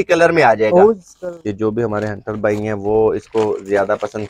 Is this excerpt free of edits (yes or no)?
no